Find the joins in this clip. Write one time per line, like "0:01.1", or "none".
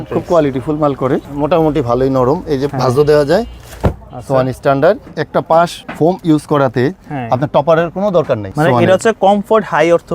0:01.3
0:05.1
0:05.8
0:08.5